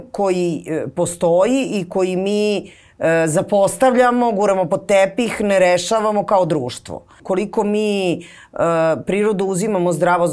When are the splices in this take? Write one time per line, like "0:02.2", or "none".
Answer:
0:07.2